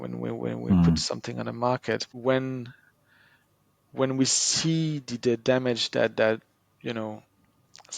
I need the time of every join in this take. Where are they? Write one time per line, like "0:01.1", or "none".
0:02.1